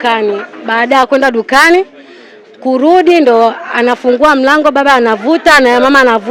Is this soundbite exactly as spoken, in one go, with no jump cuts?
yes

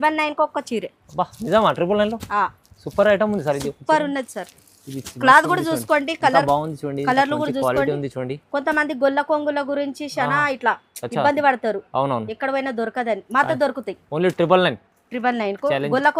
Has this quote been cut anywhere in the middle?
no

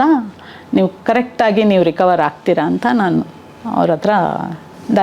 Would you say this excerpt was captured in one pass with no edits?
yes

